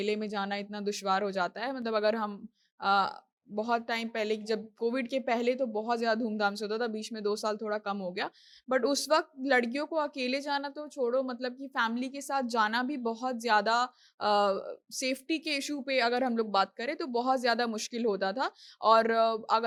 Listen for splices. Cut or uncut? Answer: uncut